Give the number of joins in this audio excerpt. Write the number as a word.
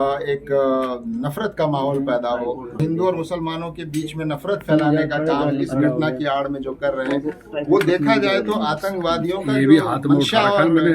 one